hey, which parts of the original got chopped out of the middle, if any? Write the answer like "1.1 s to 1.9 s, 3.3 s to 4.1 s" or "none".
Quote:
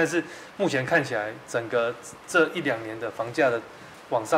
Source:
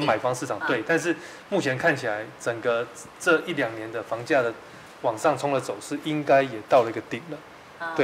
none